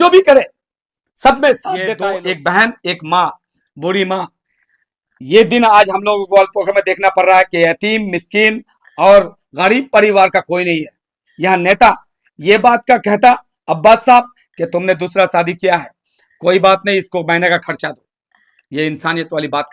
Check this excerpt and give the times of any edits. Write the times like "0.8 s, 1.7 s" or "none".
1.9 s